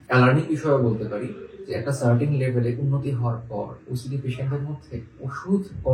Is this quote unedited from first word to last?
yes; 0 cuts

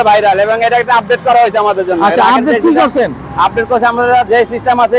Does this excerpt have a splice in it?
no; 0 cuts

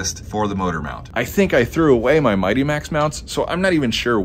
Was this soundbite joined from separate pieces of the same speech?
no; 0 cuts

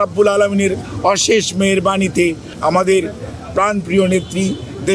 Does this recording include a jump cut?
yes; 1 cut; at 2.5 s

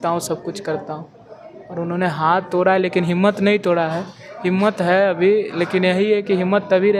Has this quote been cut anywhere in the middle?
no; 0 cuts

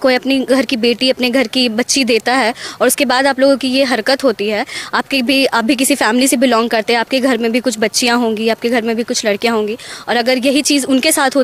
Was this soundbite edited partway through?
no; 0 cuts

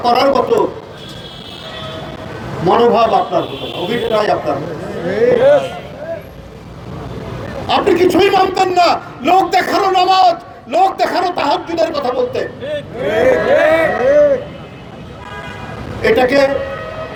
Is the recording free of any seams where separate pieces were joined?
yes; 0 cuts

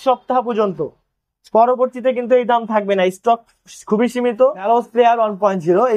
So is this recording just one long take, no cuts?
no; 1 cut; at 4.7 s

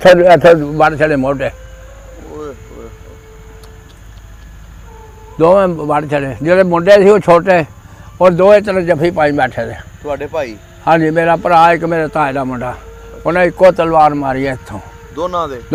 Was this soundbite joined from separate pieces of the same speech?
no; 0 cuts

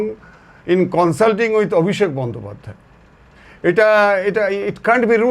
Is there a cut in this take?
no; 0 cuts

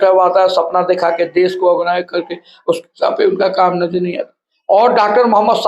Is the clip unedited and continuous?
yes; 0 cuts

